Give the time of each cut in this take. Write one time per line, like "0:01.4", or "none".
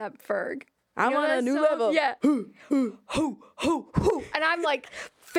0:02.2